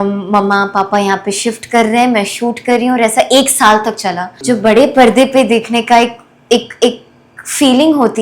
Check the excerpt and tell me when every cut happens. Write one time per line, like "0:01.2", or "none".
0:04.3